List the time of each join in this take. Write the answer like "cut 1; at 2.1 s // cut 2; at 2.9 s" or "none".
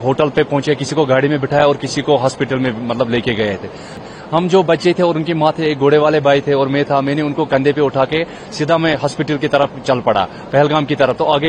cut 1; at 4.0 s